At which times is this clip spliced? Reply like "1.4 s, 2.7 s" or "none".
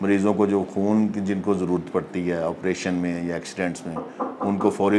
none